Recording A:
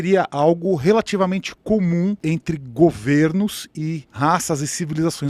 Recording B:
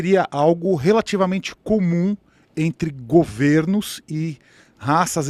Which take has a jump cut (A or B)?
A